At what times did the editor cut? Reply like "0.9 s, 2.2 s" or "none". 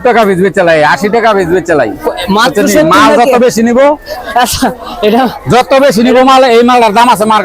none